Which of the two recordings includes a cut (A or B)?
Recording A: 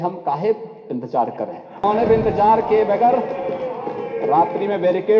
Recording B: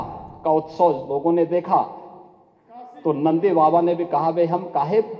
A